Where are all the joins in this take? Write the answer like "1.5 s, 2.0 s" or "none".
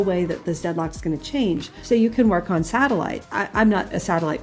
1.7 s, 3.2 s